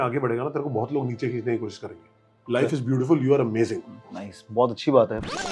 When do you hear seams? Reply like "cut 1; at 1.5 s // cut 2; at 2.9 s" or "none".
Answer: cut 1; at 3.9 s